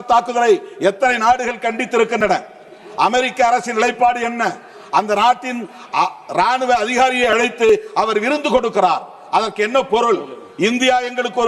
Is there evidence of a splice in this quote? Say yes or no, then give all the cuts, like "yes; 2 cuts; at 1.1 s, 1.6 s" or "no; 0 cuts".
no; 0 cuts